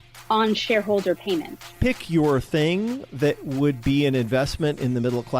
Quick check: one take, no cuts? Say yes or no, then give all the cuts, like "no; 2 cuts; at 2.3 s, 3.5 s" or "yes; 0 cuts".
no; 1 cut; at 1.8 s